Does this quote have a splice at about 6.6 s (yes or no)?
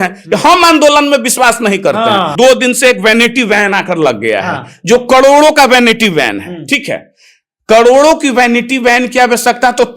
no